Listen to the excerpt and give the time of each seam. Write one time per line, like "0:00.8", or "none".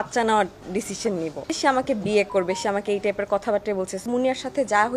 0:01.5
0:04.0